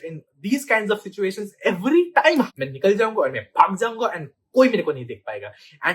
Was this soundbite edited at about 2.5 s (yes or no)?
yes